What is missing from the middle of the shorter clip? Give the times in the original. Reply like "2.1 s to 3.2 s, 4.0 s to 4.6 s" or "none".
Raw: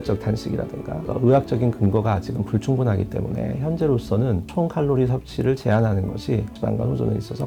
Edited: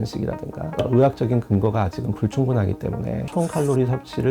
3.6 s to 4.5 s